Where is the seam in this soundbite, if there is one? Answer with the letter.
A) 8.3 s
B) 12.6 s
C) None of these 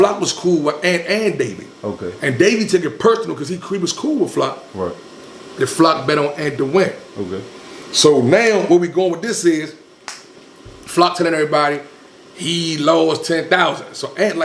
C